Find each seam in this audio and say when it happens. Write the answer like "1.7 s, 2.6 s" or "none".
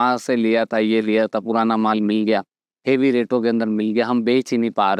none